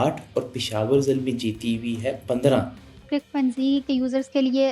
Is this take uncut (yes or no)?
no